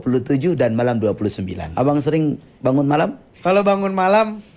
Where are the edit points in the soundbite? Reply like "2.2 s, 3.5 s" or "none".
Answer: 1.6 s, 3.3 s